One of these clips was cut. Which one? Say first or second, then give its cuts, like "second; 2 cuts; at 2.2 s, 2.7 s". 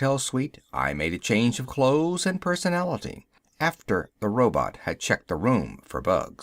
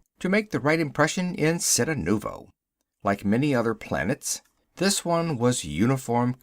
second; 1 cut; at 4.4 s